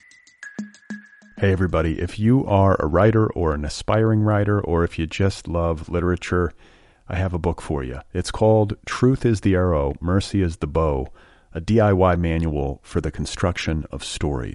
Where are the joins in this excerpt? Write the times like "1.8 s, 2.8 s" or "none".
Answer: 0.9 s